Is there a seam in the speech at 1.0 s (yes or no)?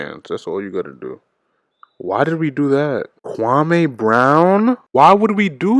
no